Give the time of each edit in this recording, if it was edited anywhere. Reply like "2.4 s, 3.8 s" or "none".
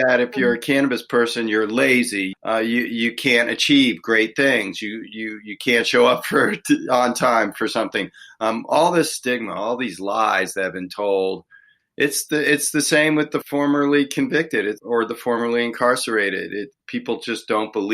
2.3 s, 13.4 s, 14.8 s, 16.8 s